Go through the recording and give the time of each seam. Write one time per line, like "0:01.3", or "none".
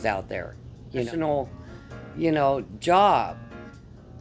0:01.1

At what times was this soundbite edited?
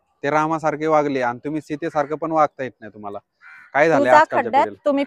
none

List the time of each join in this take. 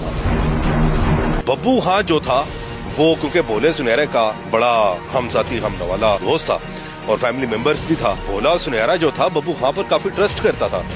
0:01.4
0:06.2
0:08.2

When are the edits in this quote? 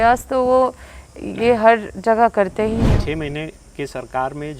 0:02.8

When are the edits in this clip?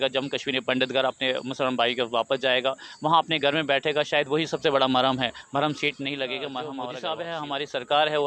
0:06.8

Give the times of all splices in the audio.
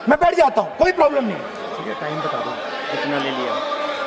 none

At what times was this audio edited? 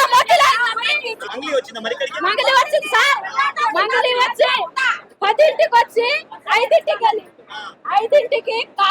0:01.2

